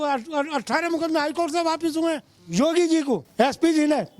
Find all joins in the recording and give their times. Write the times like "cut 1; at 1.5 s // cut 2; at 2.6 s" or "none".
cut 1; at 2.3 s // cut 2; at 3.3 s

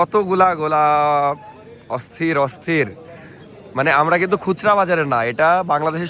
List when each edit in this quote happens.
none

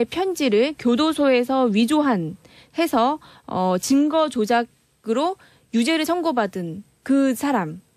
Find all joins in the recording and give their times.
none

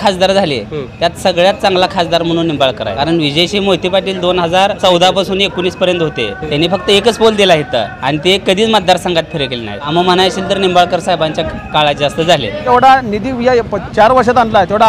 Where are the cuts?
cut 1; at 2.9 s // cut 2; at 4.8 s // cut 3; at 6.4 s // cut 4; at 7.9 s // cut 5; at 9.9 s // cut 6; at 12.7 s

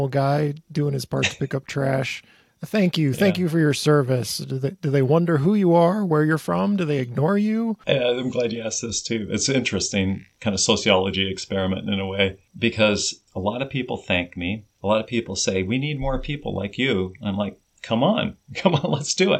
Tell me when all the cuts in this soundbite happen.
cut 1; at 7.8 s // cut 2; at 10.3 s // cut 3; at 12.4 s // cut 4; at 13.2 s // cut 5; at 14.7 s // cut 6; at 17.7 s

